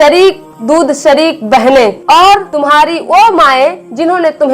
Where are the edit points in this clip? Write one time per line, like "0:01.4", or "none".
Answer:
0:02.5